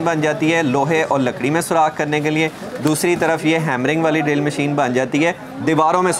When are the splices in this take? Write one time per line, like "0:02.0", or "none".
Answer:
none